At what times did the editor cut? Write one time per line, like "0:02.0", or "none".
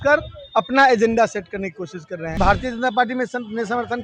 0:02.4

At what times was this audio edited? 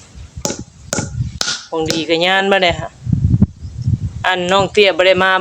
none

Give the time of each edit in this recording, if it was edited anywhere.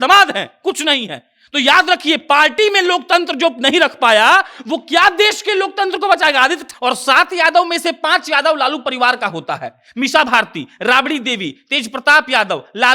0:06.6

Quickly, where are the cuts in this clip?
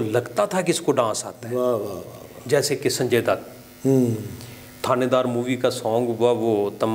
none

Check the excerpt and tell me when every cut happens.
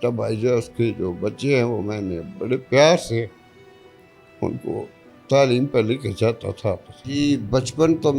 0:07.0

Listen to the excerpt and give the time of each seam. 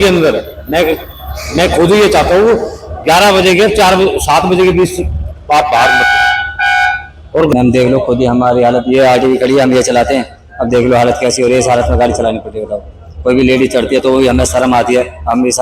0:07.5

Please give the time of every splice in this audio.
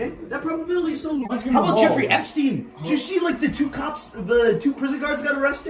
0:02.0

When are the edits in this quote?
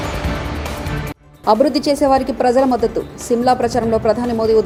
none

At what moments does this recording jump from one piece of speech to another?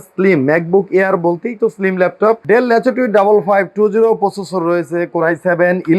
0:02.4

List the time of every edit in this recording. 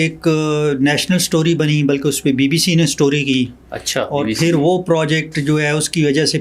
none

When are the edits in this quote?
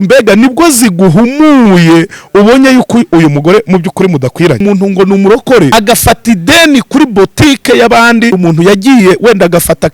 0:04.6
0:05.7
0:08.4

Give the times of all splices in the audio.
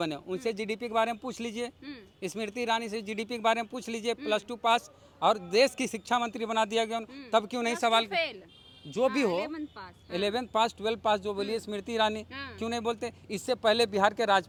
none

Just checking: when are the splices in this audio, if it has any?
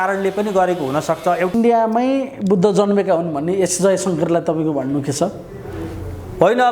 0:01.5

